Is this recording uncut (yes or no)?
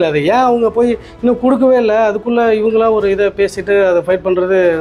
yes